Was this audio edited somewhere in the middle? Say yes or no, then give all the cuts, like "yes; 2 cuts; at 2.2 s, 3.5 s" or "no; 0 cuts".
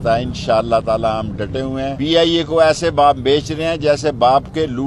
yes; 1 cut; at 1.9 s